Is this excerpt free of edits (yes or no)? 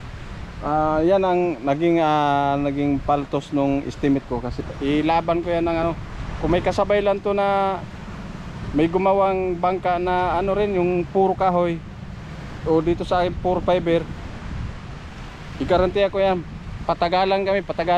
no